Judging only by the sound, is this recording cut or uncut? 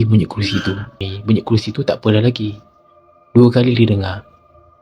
cut